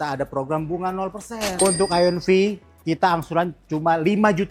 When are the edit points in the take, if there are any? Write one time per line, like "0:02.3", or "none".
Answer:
0:01.5